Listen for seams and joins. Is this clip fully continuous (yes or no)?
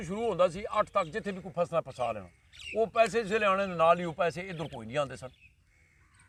yes